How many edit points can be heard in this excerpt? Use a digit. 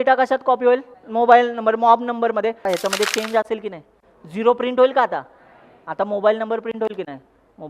2